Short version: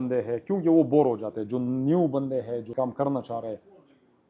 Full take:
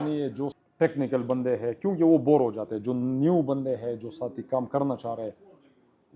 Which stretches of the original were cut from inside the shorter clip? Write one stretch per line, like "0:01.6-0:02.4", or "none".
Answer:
0:04.0-0:04.4

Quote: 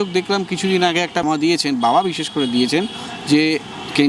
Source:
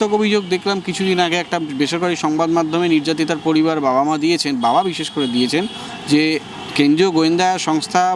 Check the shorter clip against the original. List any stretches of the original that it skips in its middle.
0:01.6-0:04.0

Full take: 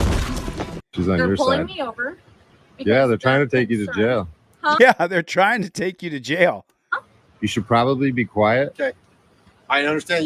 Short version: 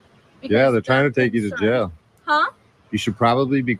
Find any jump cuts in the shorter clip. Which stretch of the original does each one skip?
0:04.7-0:06.9

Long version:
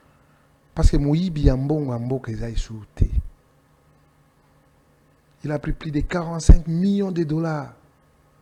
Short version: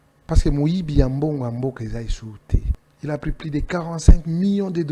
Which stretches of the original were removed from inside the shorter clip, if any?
0:03.3-0:05.2

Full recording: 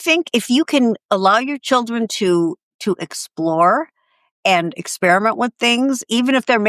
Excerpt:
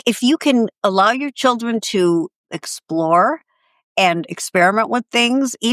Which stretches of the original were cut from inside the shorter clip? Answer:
0:02.8-0:03.0

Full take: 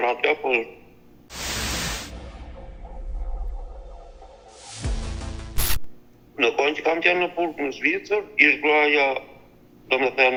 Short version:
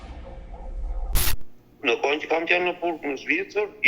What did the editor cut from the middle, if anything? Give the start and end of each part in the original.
0:03.6-0:05.8

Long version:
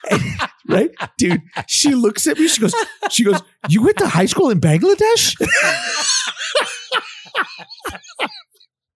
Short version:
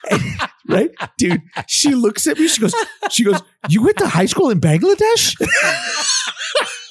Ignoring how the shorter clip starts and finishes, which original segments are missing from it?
none

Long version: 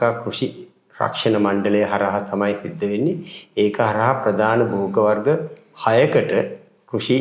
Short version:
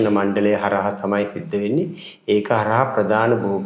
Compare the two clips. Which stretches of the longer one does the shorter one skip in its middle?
none

